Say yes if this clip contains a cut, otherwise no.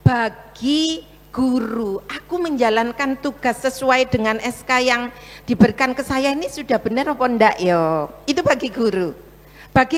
no